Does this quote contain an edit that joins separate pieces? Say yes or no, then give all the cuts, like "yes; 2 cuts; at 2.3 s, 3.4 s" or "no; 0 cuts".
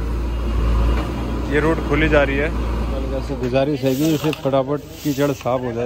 yes; 1 cut; at 3.2 s